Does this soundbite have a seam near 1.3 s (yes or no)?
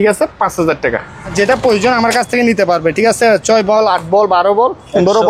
yes